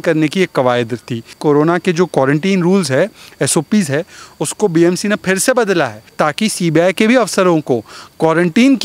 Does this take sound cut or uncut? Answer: cut